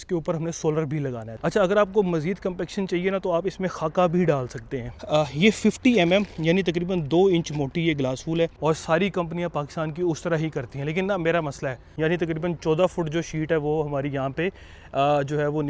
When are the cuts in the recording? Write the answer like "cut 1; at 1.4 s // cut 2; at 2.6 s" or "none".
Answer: cut 1; at 1.2 s // cut 2; at 5.0 s // cut 3; at 8.6 s // cut 4; at 11.9 s